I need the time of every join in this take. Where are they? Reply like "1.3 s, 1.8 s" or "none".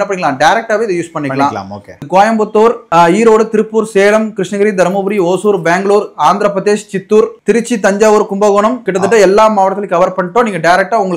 2.0 s, 7.4 s, 8.8 s